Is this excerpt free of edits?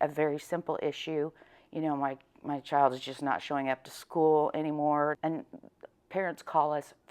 no; 1 cut; at 5.2 s

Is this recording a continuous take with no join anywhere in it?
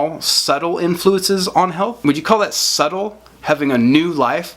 no; 1 cut; at 2.0 s

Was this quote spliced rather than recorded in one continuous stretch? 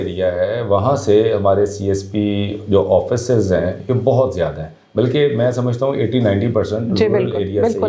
no; 0 cuts

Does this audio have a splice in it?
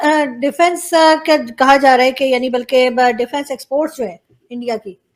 no; 0 cuts

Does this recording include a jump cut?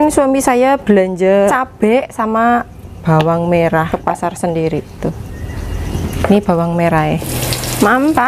yes; 3 cuts; at 1.5 s, 3.9 s, 7.3 s

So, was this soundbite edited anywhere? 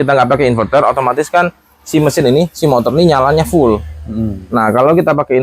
no; 0 cuts

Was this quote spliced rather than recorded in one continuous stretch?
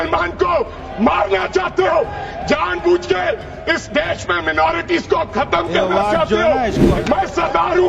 yes; 1 cut; at 6.9 s

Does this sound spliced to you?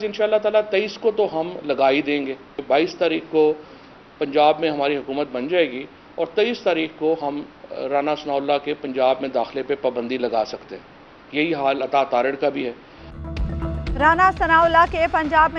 no; 0 cuts

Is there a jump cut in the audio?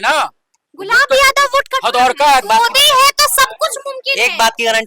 yes; 1 cut; at 2.4 s

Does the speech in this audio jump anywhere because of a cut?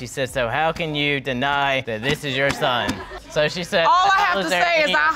no; 0 cuts

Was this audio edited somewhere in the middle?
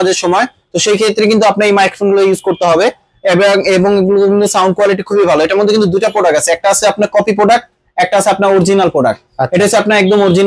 no; 0 cuts

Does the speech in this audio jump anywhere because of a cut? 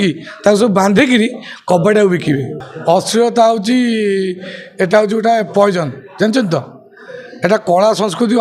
yes; 1 cut; at 2.6 s

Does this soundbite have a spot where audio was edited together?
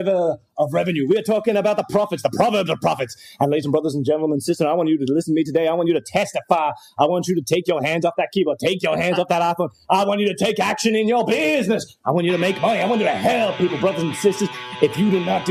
yes; 1 cut; at 2.2 s

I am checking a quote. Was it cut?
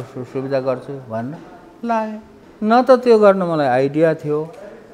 no; 0 cuts

